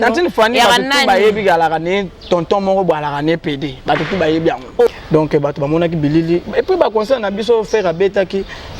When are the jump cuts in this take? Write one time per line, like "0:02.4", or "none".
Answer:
0:04.9

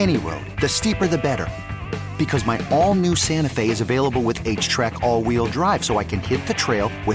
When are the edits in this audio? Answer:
none

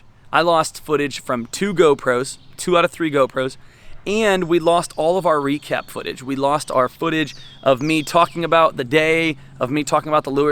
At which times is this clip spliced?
none

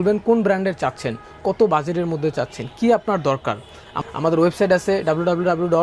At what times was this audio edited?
0:03.9

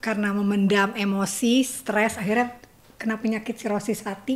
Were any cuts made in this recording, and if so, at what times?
none

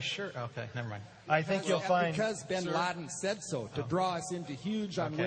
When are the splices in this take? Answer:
0:02.3

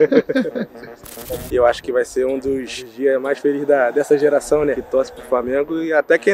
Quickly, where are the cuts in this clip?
0:01.2
0:04.8

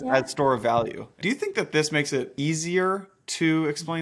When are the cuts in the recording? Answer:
0:01.2
0:02.3

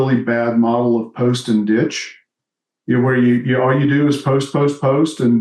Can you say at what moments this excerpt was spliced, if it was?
none

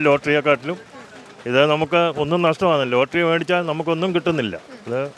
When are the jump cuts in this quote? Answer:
none

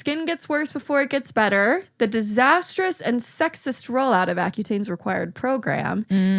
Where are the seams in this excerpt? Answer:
none

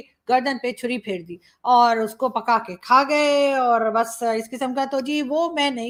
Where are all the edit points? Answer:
none

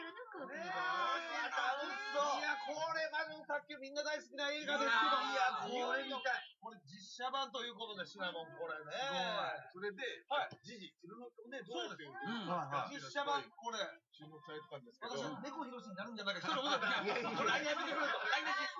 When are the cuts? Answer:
0:12.0

